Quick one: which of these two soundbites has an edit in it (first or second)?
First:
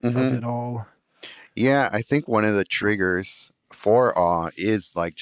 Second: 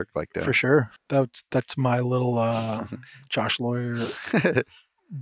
second